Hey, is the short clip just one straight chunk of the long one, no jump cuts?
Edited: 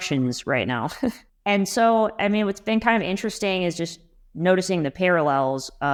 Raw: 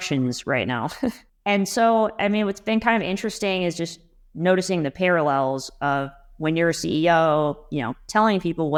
yes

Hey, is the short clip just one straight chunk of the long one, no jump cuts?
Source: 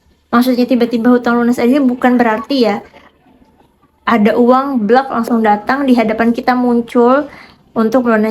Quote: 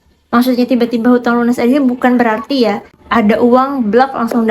no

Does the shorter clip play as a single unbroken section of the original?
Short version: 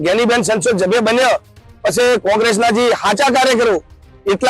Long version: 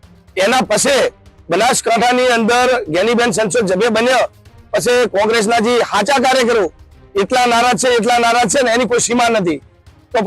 yes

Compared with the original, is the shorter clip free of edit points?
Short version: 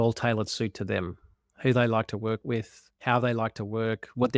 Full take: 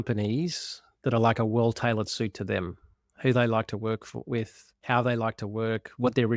no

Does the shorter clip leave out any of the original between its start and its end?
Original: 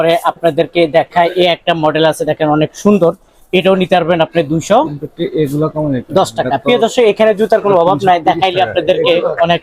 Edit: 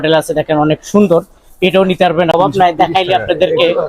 yes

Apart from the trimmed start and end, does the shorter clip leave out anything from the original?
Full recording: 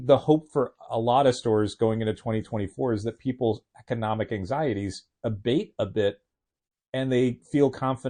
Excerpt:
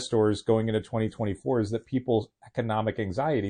no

